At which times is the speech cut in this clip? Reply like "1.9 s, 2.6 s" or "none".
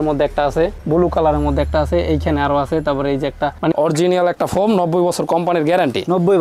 3.7 s